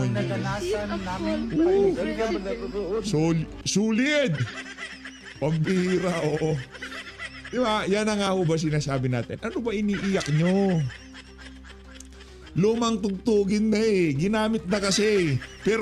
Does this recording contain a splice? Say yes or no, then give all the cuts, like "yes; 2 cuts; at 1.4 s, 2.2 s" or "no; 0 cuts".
no; 0 cuts